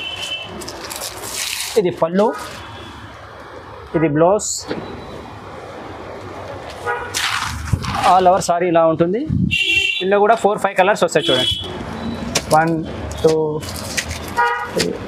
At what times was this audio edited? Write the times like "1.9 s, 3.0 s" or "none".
none